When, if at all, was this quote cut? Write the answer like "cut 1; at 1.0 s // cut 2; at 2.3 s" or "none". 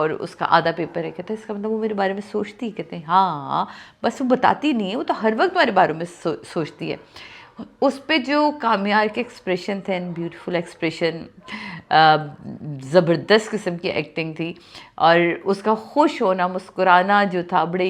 none